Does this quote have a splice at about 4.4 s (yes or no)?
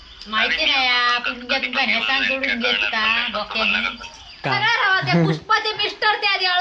yes